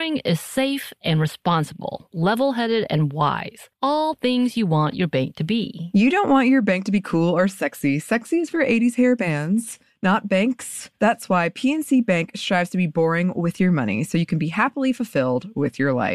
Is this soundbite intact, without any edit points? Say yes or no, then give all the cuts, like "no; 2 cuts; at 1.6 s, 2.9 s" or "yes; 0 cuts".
yes; 0 cuts